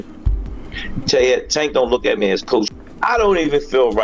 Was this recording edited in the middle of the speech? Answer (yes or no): yes